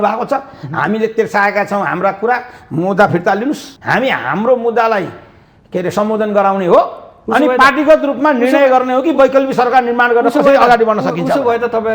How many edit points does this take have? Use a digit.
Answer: 1